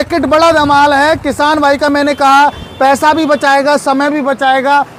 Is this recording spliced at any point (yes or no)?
no